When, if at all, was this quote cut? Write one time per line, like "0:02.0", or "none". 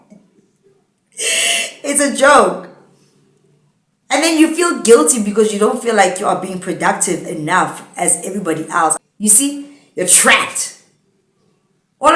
0:08.9